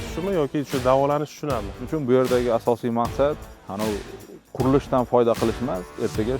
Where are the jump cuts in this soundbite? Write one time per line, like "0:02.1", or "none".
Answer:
0:01.9